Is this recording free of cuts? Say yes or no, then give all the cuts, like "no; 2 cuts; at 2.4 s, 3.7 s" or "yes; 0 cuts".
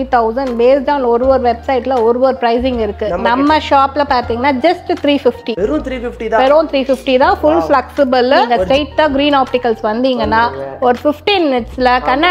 no; 1 cut; at 8.6 s